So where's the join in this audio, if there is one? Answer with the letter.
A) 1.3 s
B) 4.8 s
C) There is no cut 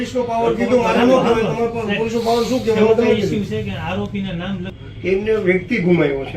B